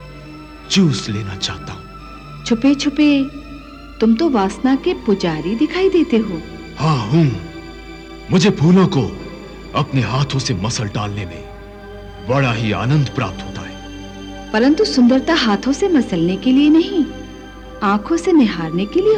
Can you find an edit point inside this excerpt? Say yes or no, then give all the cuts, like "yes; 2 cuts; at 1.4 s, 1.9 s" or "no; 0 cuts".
no; 0 cuts